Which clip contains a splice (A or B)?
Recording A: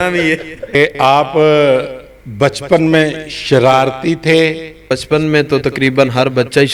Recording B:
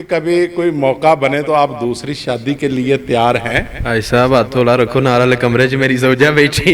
A